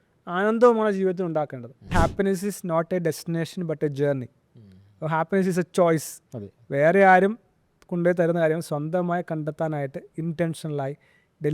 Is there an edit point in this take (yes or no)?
yes